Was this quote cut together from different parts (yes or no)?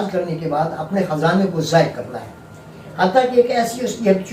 no